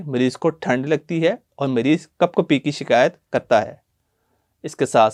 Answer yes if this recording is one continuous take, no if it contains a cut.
yes